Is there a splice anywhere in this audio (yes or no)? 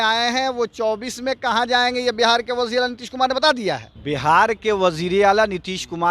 yes